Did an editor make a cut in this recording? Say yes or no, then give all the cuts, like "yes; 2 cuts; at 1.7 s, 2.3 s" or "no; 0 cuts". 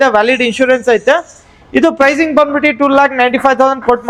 no; 0 cuts